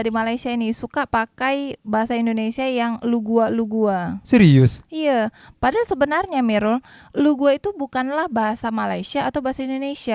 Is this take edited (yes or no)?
no